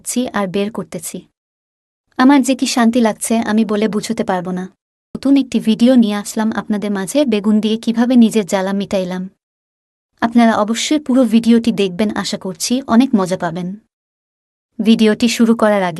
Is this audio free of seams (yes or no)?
no